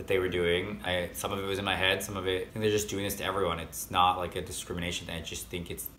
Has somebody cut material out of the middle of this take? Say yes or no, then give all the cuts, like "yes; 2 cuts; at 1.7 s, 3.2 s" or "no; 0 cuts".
yes; 2 cuts; at 0.8 s, 2.5 s